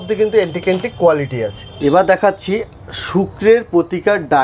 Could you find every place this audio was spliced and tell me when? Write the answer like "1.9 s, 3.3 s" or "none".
none